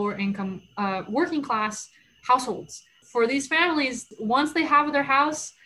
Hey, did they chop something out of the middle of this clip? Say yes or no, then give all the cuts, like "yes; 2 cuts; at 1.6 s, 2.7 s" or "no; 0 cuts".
yes; 2 cuts; at 3.0 s, 4.1 s